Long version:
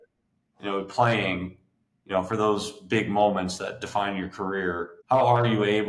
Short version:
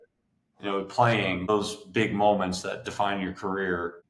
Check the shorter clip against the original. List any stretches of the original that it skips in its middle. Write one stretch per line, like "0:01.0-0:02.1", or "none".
0:01.5-0:02.4